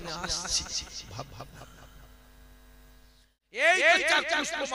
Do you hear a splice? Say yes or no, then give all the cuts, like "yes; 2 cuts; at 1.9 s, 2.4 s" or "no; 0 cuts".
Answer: yes; 1 cut; at 3.6 s